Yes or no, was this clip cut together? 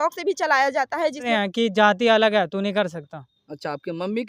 yes